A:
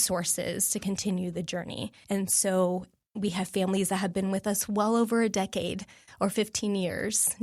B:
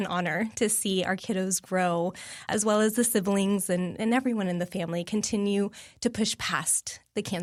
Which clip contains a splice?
A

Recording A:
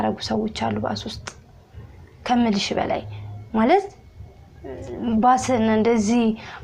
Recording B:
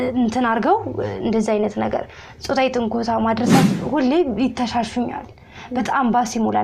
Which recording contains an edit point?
B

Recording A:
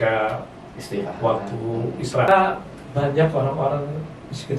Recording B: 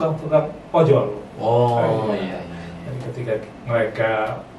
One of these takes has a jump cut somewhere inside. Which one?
A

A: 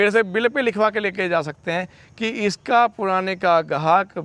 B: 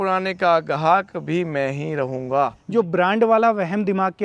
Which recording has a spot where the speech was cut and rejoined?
B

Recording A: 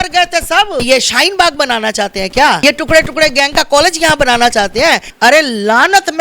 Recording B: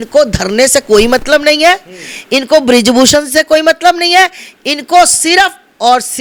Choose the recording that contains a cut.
A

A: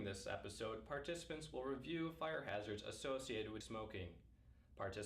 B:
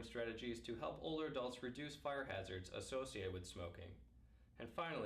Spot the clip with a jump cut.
A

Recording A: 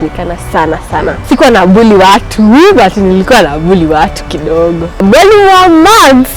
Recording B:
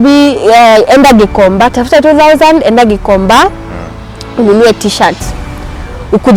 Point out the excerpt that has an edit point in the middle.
A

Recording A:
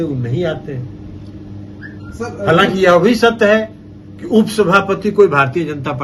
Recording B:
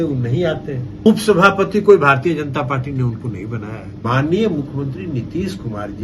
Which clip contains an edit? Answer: B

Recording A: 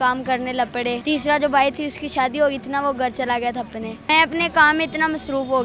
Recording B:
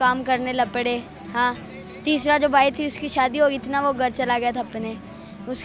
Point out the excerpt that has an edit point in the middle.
A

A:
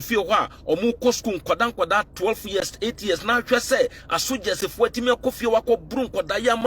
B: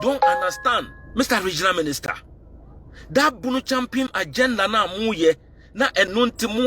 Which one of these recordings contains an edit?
B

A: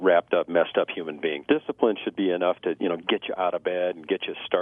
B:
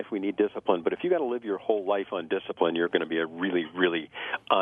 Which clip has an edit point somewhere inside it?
A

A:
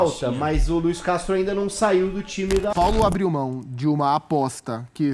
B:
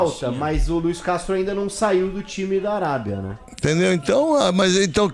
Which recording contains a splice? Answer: A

